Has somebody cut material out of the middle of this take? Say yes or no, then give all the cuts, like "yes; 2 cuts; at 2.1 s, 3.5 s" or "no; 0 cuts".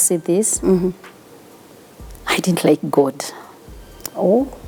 no; 0 cuts